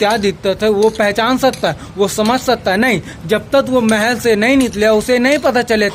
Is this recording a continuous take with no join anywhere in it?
yes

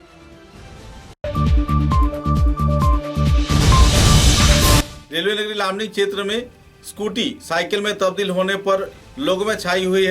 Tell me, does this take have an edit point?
no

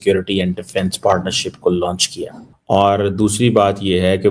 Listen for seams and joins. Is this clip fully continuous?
yes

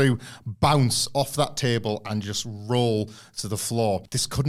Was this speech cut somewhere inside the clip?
no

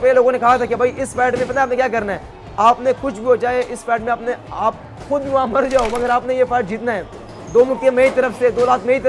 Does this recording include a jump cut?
no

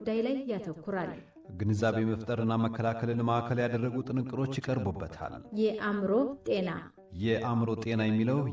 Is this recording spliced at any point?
yes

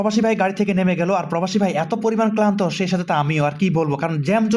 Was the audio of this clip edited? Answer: no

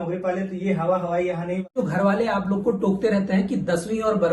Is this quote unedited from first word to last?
no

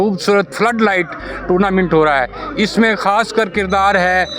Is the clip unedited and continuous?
yes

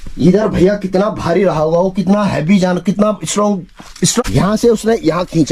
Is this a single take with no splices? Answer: no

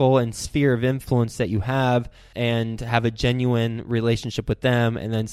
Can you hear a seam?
yes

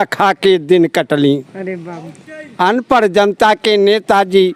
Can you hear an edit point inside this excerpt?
no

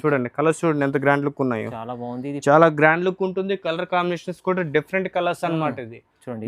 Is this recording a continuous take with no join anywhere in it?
yes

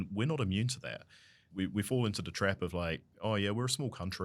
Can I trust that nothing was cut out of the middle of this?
no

